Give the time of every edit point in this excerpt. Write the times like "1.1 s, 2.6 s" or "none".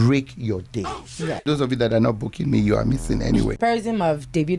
1.4 s, 3.6 s